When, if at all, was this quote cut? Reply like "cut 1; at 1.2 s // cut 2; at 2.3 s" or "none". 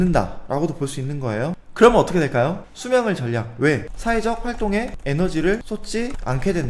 cut 1; at 1.6 s // cut 2; at 2.6 s // cut 3; at 5.6 s